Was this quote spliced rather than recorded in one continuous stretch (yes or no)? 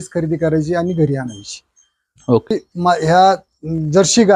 yes